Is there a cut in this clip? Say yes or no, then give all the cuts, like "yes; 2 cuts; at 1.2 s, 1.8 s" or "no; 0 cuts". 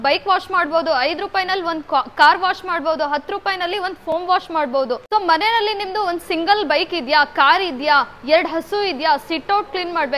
yes; 1 cut; at 5.0 s